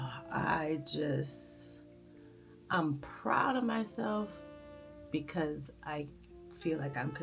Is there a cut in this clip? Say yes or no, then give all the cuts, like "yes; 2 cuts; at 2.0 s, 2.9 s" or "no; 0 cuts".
no; 0 cuts